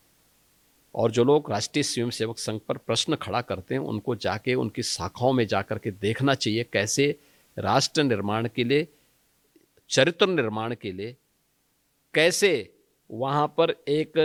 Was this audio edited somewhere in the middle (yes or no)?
no